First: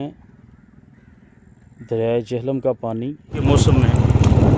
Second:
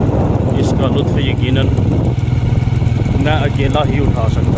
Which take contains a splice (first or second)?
first